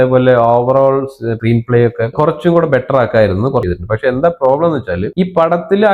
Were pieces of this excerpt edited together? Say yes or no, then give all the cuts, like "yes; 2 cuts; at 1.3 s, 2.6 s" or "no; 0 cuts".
yes; 1 cut; at 3.6 s